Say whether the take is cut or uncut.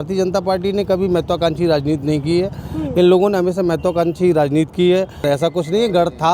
cut